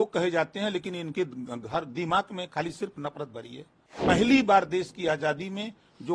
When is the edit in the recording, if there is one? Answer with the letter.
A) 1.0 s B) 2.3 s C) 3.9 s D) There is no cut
C